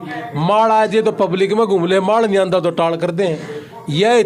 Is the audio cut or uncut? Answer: uncut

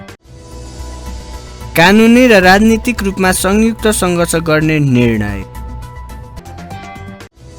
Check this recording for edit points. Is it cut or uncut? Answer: cut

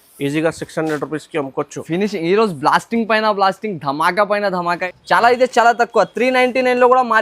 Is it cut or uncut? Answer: cut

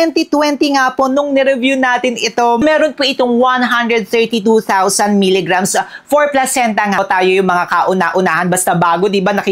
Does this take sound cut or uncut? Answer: cut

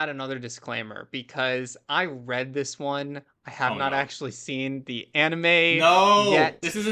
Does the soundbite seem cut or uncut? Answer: uncut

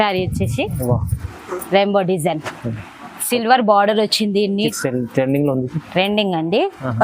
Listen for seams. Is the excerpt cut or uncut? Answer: cut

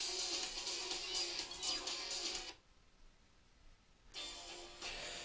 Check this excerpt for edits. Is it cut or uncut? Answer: uncut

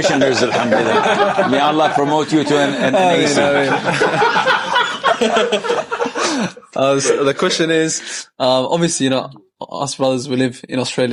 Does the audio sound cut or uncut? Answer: uncut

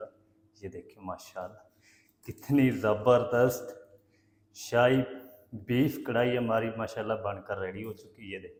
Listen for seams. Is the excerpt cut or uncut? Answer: uncut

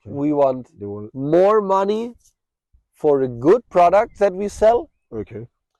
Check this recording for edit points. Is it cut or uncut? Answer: uncut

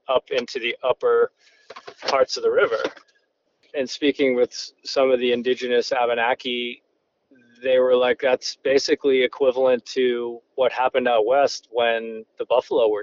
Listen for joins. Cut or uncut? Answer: uncut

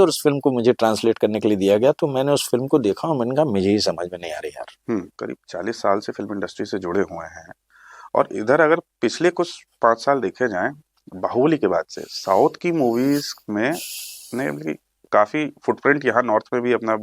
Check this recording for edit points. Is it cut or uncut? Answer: cut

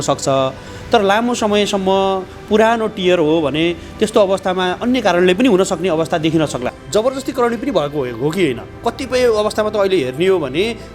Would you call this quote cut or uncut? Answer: cut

